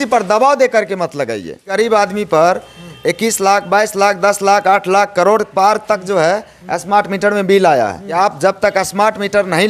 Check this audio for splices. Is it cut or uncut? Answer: cut